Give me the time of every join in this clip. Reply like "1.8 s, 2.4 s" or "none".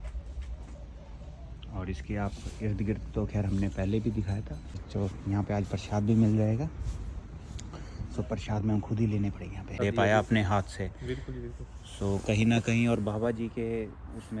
4.8 s, 9.7 s